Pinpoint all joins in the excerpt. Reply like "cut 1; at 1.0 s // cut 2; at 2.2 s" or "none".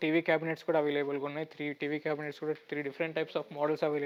none

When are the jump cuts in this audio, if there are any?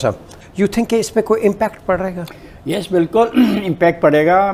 none

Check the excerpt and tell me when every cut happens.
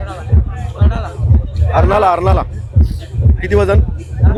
none

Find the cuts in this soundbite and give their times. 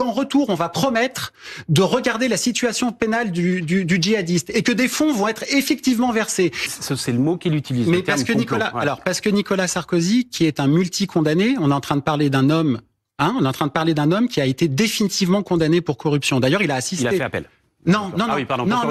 cut 1; at 6.7 s

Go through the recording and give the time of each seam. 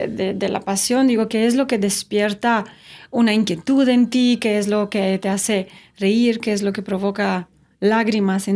none

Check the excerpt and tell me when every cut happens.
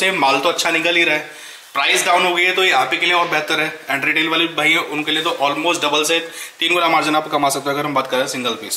none

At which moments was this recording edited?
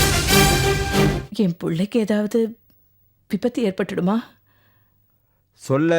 cut 1; at 1.2 s

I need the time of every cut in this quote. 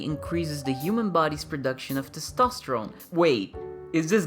cut 1; at 3.0 s

